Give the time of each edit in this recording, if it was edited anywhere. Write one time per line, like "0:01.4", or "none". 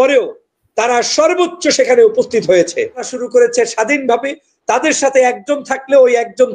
0:03.2